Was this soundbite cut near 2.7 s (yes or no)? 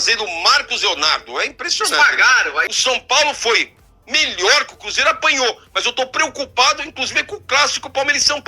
yes